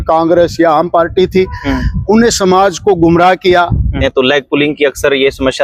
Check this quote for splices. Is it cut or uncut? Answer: cut